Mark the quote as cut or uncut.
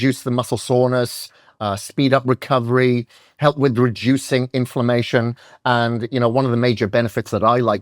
uncut